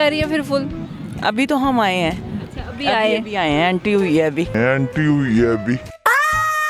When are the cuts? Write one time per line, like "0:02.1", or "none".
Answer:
none